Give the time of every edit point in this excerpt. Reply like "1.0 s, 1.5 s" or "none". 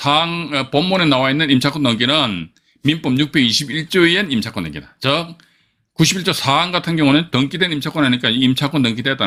none